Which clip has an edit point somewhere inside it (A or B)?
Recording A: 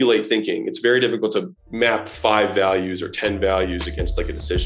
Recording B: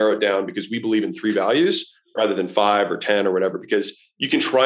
A